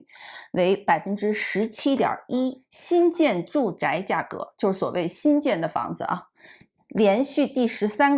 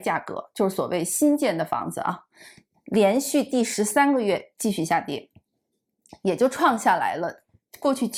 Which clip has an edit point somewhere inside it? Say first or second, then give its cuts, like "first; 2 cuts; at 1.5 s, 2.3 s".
first; 1 cut; at 2.7 s